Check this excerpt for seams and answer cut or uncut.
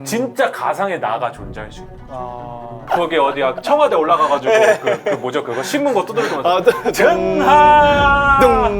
cut